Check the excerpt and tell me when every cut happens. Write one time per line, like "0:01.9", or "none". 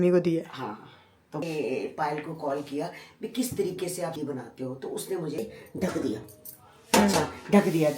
0:01.4
0:04.2
0:05.4

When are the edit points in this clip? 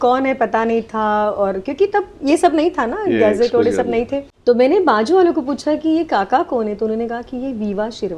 0:04.2

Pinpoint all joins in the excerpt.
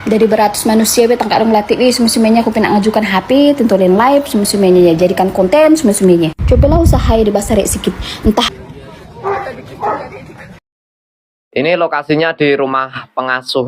0:08.6

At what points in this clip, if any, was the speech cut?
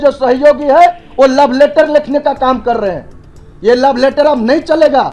none

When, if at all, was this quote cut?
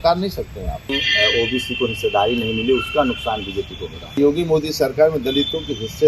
0:00.9
0:04.2

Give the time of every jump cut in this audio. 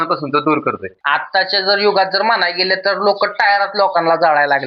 0:01.3

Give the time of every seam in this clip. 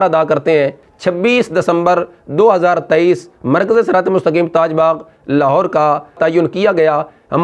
0:00.9
0:06.2

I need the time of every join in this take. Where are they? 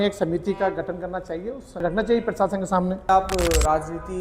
0:01.7
0:03.1

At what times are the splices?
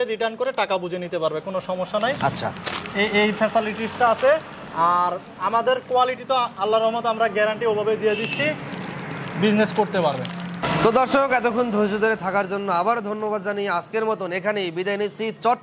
none

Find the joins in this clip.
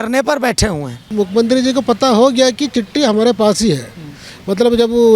0:01.1

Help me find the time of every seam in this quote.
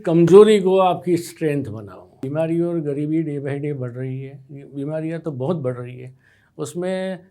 0:02.2

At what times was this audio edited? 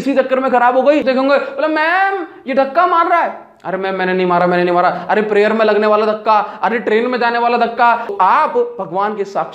0:01.0
0:08.1

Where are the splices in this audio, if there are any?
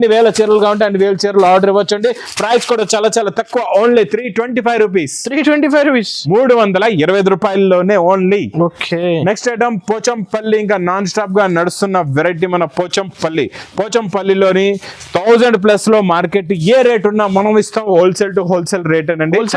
none

